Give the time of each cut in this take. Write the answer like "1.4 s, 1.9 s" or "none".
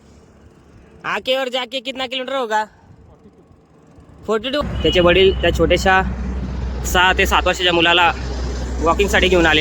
4.6 s